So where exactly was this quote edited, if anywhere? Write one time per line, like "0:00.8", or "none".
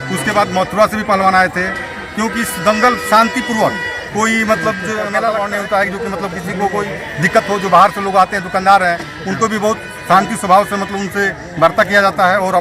0:05.3